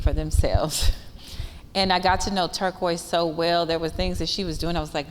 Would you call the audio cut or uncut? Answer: uncut